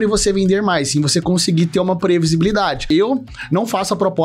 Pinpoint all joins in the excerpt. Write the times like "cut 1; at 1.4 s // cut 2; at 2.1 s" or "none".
cut 1; at 2.9 s